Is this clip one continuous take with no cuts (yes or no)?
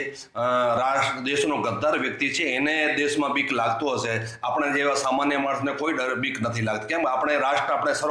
yes